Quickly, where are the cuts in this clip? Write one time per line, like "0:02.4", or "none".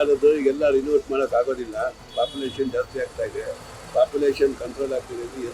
0:02.1

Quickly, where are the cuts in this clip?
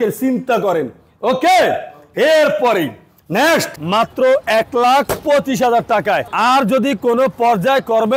0:03.7

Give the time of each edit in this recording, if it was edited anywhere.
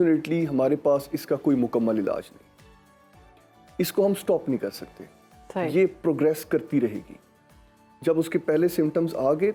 none

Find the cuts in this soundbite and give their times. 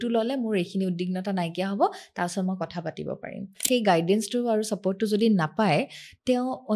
0:03.7

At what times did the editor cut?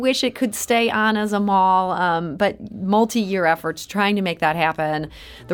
none

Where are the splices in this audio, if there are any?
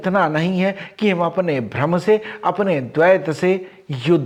none

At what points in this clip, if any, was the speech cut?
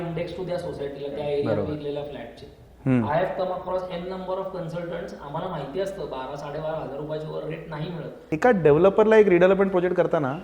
0:08.2

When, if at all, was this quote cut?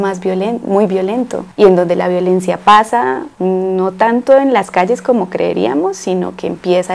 none

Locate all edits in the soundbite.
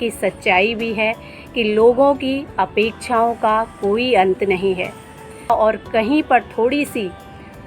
0:05.5

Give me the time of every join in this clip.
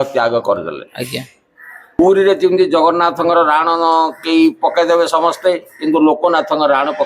0:02.0

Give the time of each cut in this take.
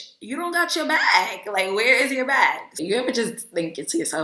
0:02.7

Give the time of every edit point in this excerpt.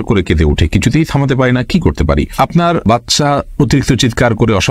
none

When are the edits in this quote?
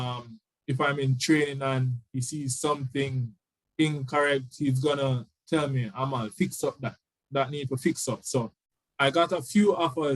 0:08.6

